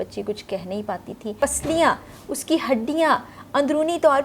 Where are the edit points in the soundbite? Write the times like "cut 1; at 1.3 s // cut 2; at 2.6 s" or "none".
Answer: cut 1; at 1.3 s